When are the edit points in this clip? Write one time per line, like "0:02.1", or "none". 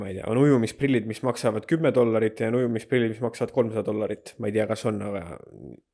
none